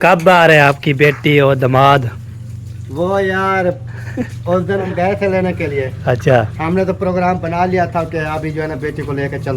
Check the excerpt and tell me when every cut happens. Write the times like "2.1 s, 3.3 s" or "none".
4.9 s